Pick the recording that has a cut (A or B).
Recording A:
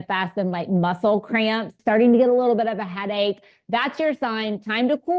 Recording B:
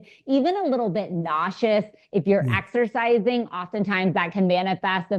A